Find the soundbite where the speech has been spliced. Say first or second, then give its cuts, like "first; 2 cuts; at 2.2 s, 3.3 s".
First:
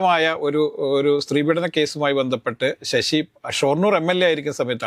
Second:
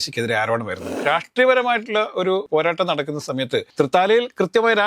second; 3 cuts; at 0.9 s, 2.5 s, 3.7 s